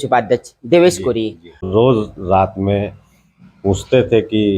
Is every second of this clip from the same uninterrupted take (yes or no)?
no